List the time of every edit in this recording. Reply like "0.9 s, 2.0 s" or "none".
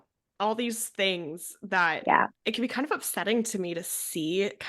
2.3 s